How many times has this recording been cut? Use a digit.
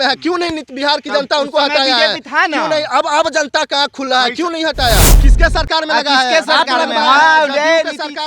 1